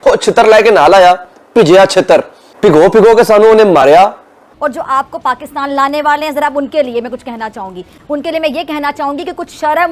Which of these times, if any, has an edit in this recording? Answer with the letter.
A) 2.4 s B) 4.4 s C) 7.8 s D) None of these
B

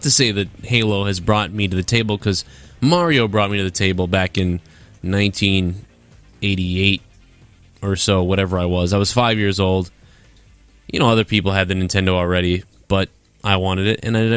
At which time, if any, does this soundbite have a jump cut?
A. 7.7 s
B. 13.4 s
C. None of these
B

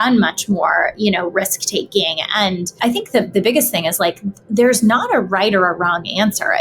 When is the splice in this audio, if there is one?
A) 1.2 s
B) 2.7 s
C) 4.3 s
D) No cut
B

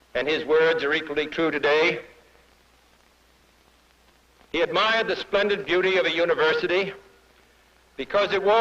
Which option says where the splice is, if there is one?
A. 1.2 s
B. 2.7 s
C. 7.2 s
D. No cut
B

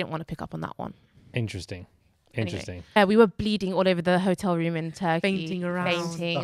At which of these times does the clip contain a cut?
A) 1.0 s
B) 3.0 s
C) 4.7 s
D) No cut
B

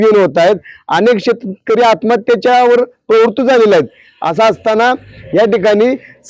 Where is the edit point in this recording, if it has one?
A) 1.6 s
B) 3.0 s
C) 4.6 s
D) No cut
D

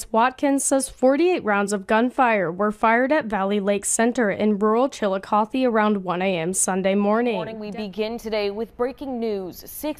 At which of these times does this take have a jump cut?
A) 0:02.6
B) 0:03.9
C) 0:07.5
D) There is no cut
C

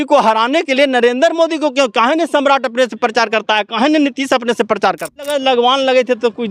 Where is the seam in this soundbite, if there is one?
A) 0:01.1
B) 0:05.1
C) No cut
B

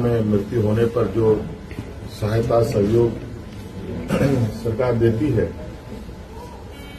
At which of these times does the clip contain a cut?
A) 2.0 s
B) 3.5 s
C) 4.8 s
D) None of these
D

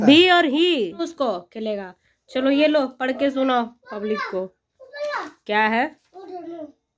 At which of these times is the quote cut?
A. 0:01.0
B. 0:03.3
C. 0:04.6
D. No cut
A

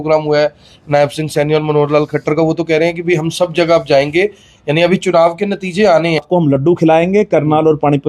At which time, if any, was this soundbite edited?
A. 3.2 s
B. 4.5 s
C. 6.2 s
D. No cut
C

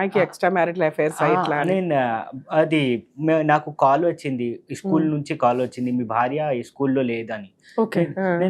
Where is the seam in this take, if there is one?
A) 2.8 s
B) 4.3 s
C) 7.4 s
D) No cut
D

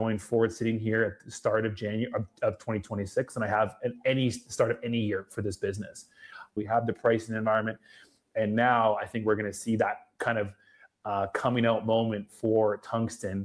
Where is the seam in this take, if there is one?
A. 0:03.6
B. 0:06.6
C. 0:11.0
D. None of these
B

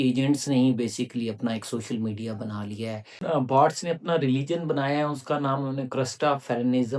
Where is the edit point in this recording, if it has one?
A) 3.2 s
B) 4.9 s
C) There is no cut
A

